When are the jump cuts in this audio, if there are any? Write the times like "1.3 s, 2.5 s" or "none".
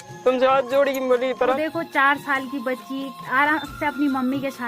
1.6 s